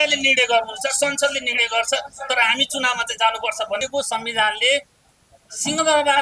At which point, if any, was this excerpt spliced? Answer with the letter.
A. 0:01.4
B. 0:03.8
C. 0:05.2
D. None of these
B